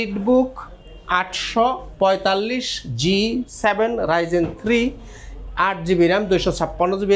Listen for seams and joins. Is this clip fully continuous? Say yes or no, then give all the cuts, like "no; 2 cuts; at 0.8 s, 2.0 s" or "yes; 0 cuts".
yes; 0 cuts